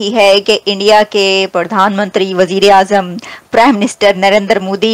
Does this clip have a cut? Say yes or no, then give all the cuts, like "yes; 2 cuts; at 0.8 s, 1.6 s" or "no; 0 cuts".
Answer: no; 0 cuts